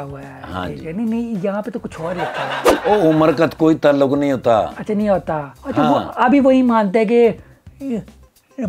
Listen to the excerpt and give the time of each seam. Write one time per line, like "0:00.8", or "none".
0:02.8